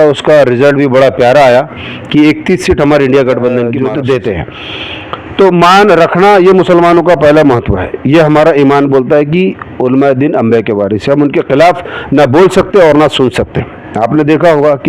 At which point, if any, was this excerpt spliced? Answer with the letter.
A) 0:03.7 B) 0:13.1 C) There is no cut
A